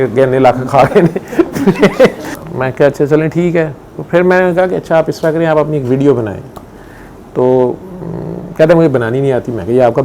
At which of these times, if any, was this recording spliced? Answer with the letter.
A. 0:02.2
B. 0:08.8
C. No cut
A